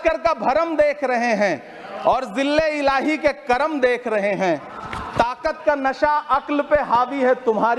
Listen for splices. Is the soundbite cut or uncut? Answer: uncut